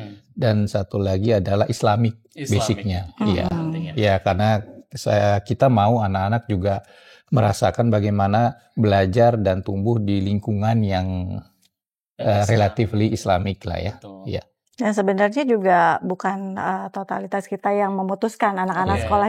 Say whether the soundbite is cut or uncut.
uncut